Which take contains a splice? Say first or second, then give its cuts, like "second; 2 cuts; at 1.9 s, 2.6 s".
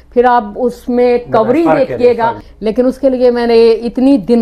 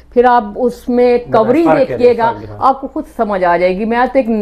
first; 1 cut; at 2.5 s